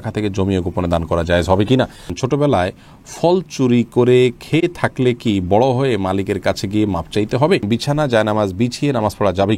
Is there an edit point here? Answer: yes; 2 cuts; at 2.1 s, 7.6 s

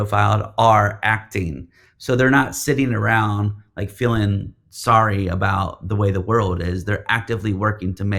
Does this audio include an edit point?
no; 0 cuts

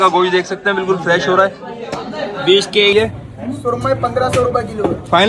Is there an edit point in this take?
yes; 1 cut; at 2.9 s

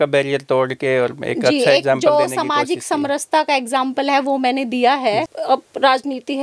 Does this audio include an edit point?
yes; 1 cut; at 5.3 s

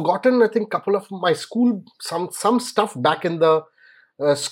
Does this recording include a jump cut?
no; 0 cuts

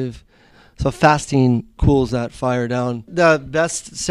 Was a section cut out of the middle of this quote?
yes; 2 cuts; at 1.7 s, 3.0 s

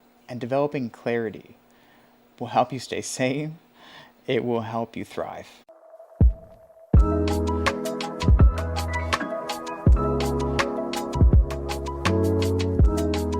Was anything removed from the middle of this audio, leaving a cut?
no; 0 cuts

